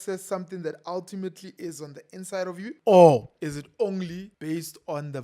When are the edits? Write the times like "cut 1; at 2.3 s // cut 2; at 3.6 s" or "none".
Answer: cut 1; at 2.8 s // cut 2; at 3.3 s // cut 3; at 4.3 s